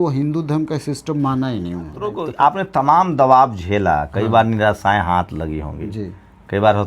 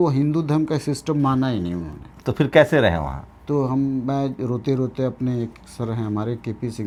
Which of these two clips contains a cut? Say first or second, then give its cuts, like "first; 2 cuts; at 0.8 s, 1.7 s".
first; 1 cut; at 2.2 s